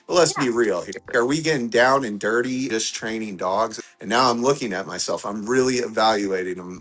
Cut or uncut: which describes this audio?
cut